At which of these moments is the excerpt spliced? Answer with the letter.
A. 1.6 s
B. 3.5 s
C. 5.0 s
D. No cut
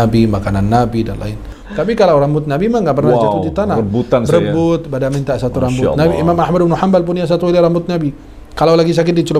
A